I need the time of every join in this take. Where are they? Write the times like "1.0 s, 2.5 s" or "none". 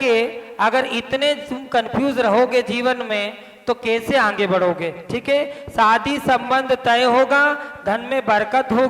none